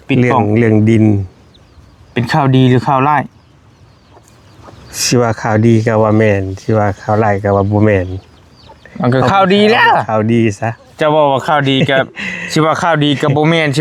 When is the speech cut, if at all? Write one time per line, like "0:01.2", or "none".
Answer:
none